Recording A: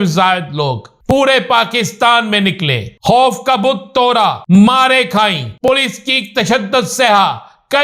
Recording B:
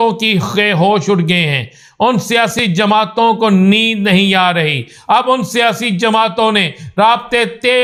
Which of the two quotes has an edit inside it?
A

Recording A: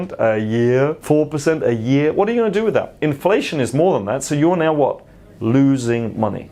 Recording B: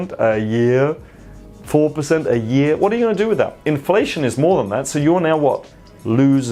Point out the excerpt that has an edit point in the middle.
A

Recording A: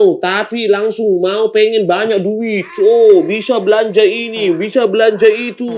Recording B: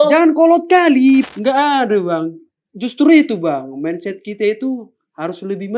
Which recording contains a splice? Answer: B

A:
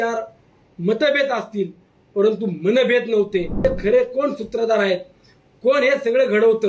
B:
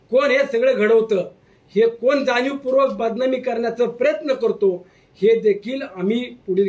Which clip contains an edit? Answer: A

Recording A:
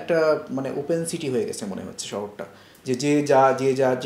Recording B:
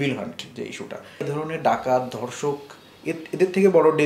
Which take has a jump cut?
B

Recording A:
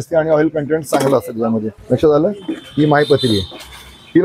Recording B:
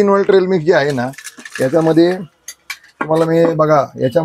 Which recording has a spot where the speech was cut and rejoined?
A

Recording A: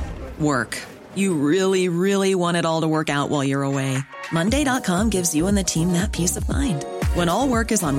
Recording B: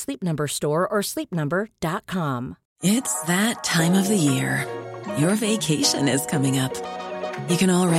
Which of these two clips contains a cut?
B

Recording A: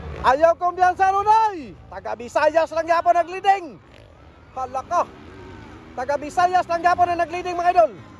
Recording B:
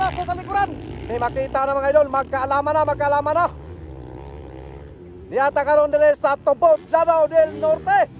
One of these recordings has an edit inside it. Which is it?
B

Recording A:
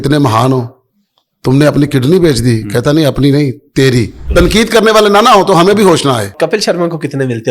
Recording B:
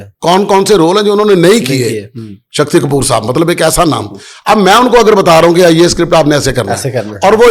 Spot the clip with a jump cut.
A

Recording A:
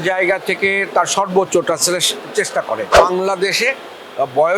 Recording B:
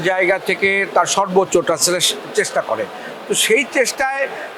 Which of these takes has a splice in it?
A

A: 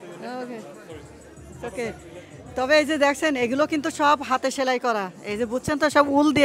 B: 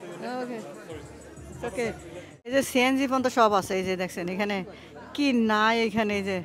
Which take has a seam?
B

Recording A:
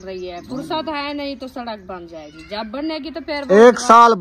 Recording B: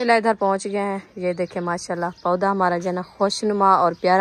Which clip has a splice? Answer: A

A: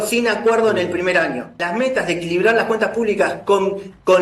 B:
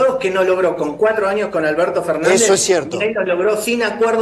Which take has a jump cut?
A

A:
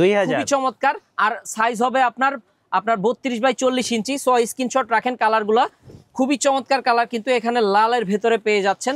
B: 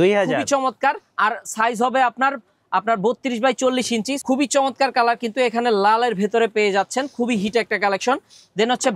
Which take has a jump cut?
B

